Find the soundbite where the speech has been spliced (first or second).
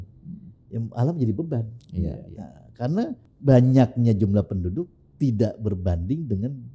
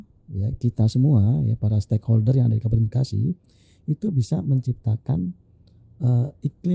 first